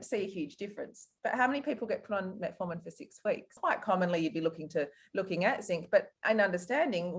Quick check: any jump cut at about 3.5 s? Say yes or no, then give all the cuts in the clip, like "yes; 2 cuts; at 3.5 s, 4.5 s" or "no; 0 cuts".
yes; 1 cut; at 3.5 s